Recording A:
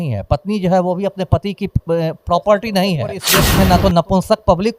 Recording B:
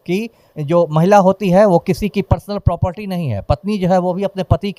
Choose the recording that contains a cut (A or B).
A